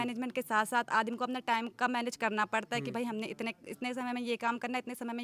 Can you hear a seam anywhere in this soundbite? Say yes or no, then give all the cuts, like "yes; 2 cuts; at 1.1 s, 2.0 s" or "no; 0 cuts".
no; 0 cuts